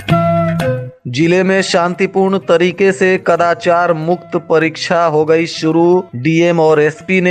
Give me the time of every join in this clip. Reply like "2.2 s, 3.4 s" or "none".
0.9 s